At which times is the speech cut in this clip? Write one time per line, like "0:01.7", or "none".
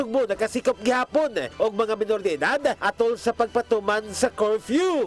none